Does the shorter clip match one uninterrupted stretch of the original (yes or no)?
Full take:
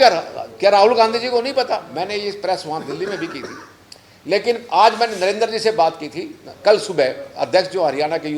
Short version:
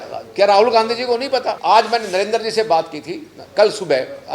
no